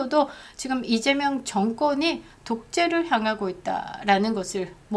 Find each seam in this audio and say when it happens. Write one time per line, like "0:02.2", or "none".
none